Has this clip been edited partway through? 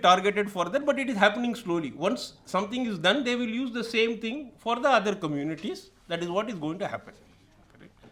no; 0 cuts

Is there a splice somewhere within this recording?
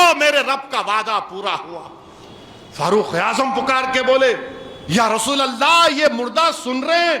no; 0 cuts

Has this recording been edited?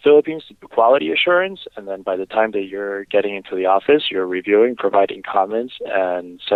no; 0 cuts

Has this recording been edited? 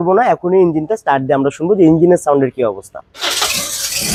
no; 0 cuts

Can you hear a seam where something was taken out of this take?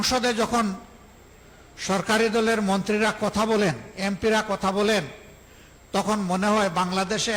no; 0 cuts

